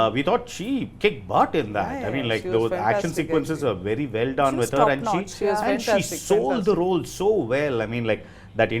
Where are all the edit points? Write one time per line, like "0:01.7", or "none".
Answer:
none

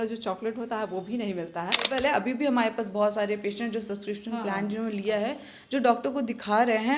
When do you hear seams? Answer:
0:01.9

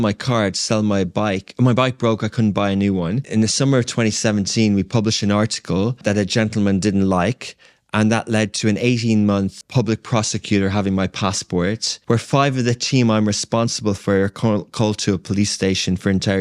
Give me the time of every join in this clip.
0:03.2
0:06.0
0:09.6
0:11.9

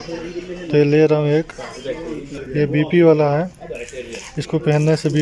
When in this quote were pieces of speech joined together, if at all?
0:02.4

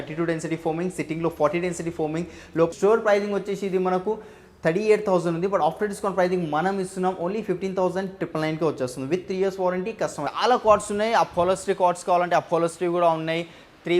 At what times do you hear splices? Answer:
0:02.7
0:10.2

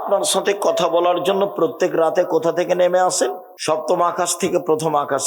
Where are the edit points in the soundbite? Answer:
0:03.5

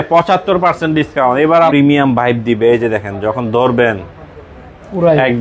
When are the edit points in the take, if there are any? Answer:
0:01.7

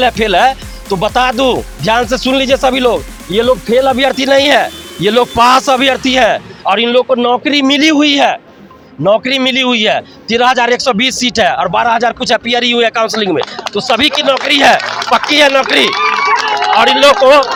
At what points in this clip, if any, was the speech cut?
none

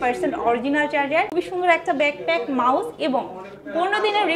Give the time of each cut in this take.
0:01.3

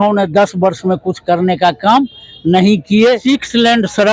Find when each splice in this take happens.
0:03.2

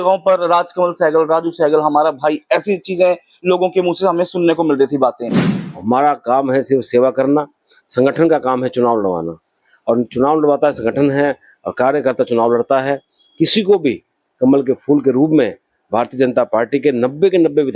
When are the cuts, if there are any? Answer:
0:05.5

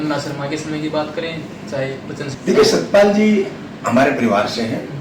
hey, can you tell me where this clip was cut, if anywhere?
0:02.3

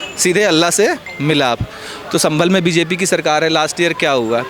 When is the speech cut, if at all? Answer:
none

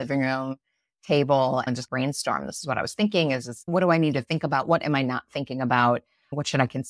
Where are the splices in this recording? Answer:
0:01.7
0:03.6

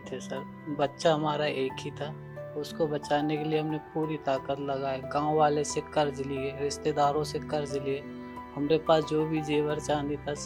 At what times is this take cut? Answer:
none

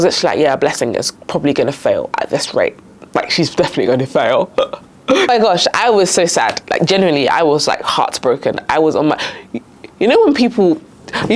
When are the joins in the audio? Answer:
0:05.3

